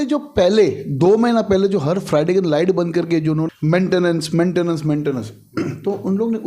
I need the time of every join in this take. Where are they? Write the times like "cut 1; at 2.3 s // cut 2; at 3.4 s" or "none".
cut 1; at 3.5 s

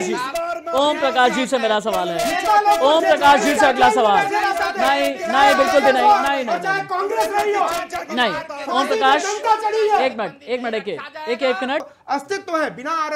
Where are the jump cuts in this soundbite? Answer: cut 1; at 11.9 s

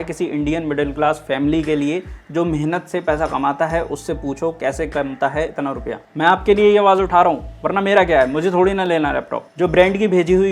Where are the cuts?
cut 1; at 6.1 s // cut 2; at 9.4 s

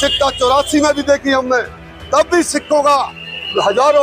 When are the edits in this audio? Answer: none

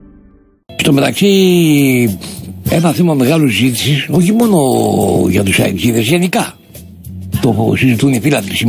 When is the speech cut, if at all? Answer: none

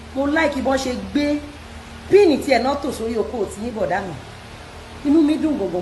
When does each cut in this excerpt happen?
none

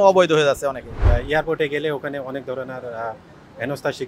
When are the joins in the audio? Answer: cut 1; at 1.0 s

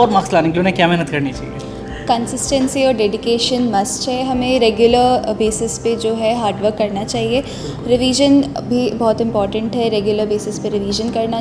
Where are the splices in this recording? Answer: none

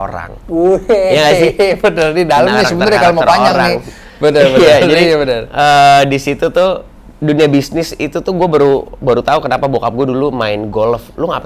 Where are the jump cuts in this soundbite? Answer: none

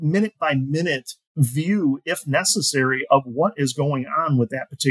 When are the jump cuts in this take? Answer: cut 1; at 1.2 s

